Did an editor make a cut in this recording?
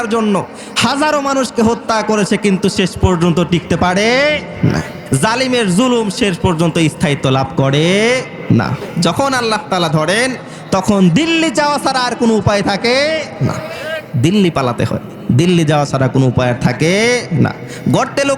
yes; 2 cuts; at 4.9 s, 8.8 s

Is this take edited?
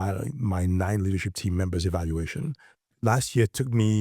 yes; 1 cut; at 2.9 s

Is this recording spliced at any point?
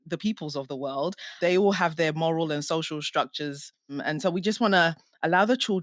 yes; 2 cuts; at 1.3 s, 4.0 s

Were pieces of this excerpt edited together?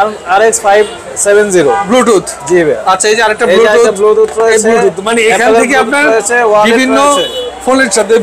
no; 0 cuts

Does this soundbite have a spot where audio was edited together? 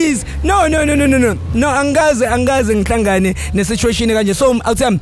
no; 0 cuts

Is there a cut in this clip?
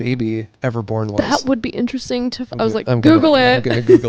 no; 0 cuts

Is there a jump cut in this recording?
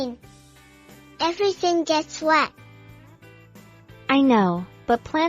yes; 2 cuts; at 2.5 s, 4.0 s

